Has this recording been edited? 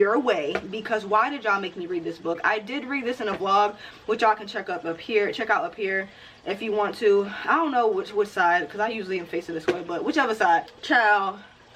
no; 0 cuts

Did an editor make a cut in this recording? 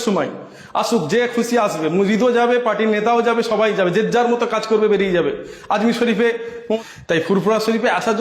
yes; 1 cut; at 6.8 s

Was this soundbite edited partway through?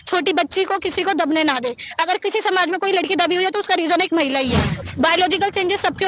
yes; 1 cut; at 4.7 s

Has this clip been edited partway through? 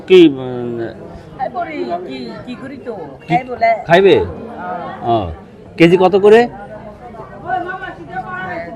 no; 0 cuts

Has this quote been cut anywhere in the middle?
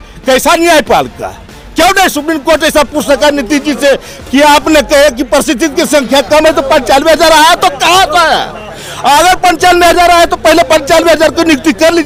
no; 0 cuts

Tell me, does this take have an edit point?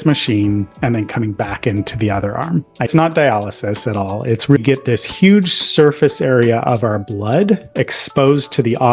yes; 2 cuts; at 2.9 s, 4.6 s

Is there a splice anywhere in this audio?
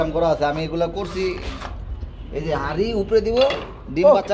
no; 0 cuts

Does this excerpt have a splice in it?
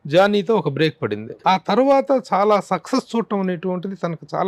yes; 1 cut; at 1.3 s

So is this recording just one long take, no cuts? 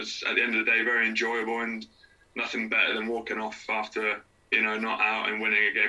no; 1 cut; at 4.3 s

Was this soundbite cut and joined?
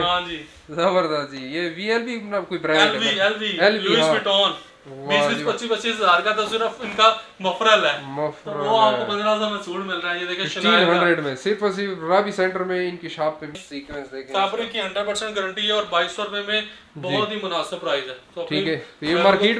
yes; 1 cut; at 13.5 s

